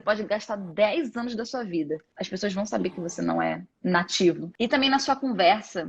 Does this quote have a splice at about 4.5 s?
yes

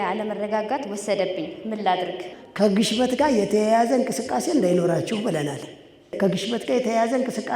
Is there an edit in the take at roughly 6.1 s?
yes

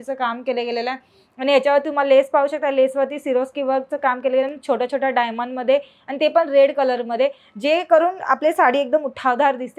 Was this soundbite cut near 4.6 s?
no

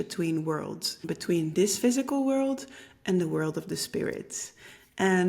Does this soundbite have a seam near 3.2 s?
no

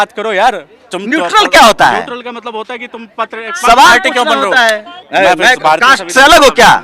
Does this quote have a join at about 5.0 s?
yes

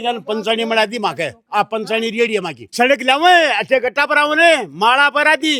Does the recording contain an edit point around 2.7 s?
yes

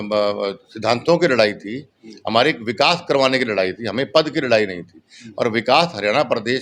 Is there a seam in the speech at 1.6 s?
no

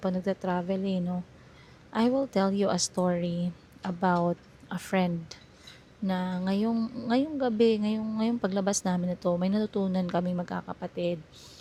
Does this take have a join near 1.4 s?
no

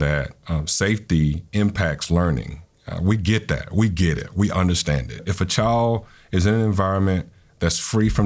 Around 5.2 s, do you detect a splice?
yes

